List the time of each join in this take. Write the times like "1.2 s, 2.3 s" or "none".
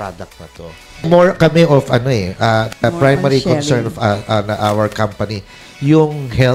1.1 s